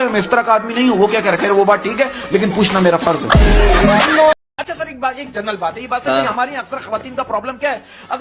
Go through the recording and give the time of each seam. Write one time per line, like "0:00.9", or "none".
0:04.3